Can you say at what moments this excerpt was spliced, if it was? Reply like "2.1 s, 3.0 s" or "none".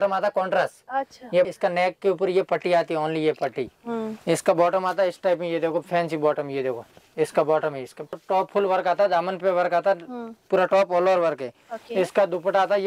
1.5 s, 8.2 s